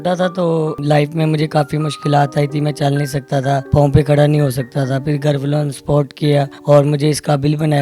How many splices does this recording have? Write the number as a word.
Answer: three